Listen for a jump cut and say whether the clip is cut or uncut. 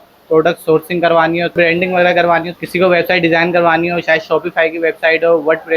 cut